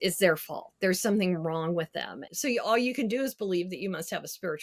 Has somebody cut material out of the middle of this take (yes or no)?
yes